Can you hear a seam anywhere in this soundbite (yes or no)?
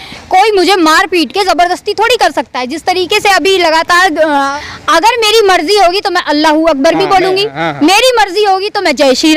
yes